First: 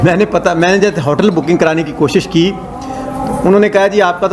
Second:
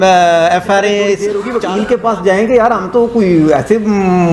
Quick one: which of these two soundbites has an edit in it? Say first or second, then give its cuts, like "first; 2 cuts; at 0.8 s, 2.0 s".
second; 1 cut; at 1.3 s